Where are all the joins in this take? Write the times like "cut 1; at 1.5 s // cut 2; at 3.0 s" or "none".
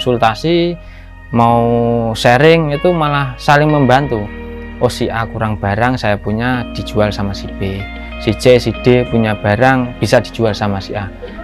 none